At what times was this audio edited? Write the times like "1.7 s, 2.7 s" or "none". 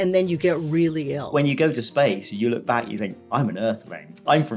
1.3 s